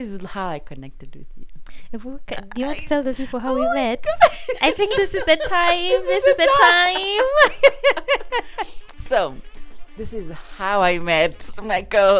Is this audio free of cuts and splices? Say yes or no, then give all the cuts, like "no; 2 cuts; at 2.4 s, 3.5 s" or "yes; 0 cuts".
yes; 0 cuts